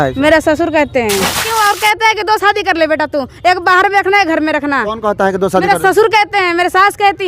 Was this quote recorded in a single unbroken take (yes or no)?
no